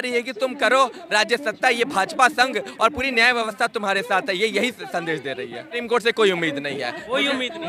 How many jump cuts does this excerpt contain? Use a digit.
1